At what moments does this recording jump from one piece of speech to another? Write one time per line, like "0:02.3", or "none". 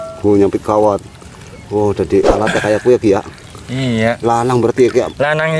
none